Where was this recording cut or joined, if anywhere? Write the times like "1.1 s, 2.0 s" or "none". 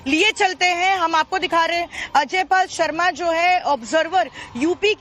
none

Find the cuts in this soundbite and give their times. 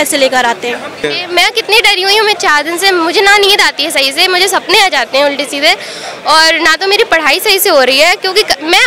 1.0 s

